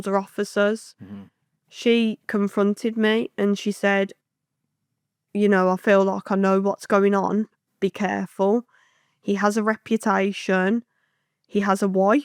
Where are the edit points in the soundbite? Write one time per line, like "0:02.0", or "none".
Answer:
none